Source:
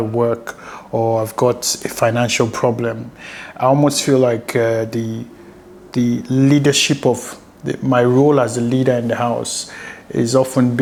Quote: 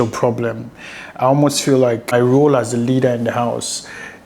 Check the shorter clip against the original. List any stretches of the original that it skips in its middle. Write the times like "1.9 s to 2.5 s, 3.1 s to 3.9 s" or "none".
4.5 s to 8.0 s